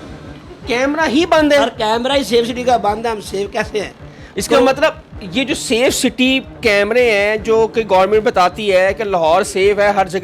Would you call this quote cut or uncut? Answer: uncut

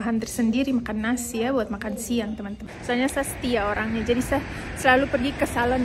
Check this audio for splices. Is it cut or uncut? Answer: cut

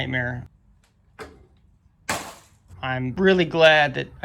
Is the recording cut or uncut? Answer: cut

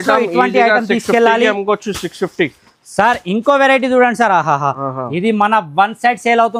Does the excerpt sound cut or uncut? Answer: uncut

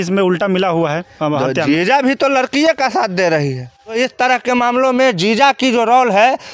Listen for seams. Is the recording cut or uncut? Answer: cut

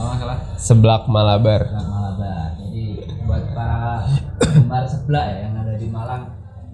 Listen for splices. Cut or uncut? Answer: uncut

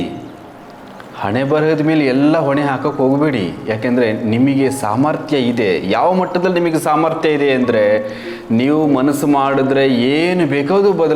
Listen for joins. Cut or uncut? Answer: uncut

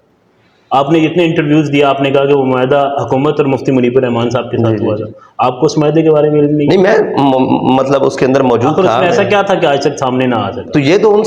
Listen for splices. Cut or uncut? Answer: uncut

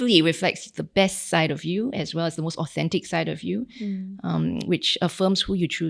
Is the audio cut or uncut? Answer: uncut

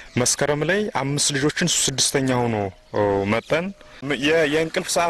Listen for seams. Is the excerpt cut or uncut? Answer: cut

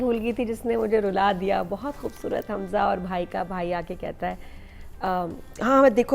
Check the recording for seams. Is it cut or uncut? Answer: uncut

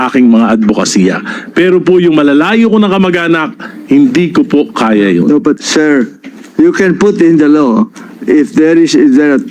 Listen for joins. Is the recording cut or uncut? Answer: cut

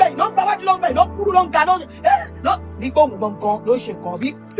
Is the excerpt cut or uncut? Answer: uncut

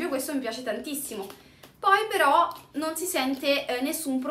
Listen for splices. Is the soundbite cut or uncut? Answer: uncut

